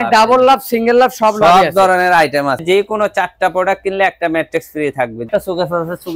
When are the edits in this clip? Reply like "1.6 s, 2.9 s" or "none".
2.6 s, 5.3 s